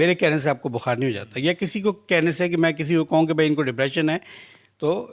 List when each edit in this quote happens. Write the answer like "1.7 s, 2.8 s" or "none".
none

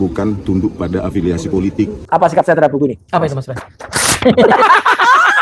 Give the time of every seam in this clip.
1.9 s

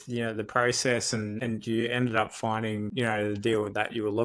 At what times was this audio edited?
1.3 s, 2.9 s

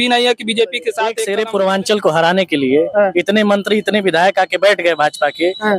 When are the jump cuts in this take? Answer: 1.2 s

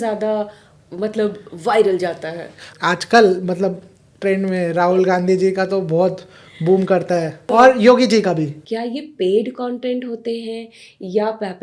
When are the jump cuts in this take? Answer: 2.7 s, 7.4 s, 8.6 s

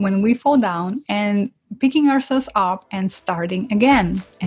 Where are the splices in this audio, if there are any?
none

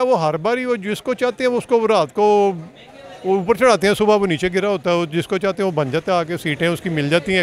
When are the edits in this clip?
none

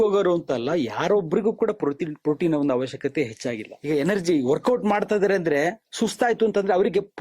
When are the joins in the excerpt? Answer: 3.7 s

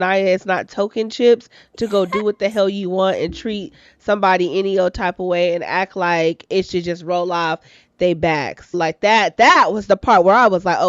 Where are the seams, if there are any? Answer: 8.7 s

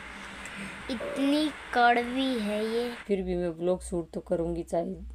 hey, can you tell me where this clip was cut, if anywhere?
3.0 s

